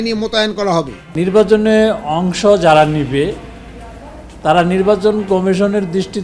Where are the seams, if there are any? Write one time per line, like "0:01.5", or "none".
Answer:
0:01.0